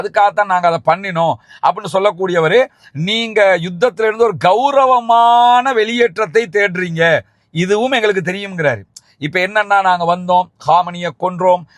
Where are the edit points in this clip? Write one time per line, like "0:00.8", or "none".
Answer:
none